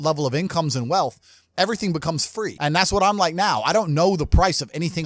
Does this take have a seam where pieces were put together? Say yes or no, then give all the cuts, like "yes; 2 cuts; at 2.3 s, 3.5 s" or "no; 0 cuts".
yes; 1 cut; at 2.6 s